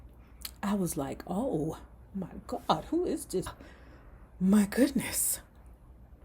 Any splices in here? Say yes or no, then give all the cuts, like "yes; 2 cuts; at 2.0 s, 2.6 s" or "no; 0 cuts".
yes; 1 cut; at 3.5 s